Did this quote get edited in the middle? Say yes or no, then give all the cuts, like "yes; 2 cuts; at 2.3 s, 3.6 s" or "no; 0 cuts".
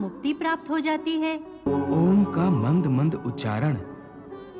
yes; 1 cut; at 1.7 s